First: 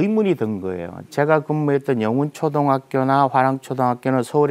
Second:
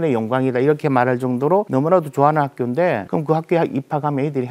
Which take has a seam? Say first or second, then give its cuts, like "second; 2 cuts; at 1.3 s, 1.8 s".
second; 2 cuts; at 1.7 s, 3.0 s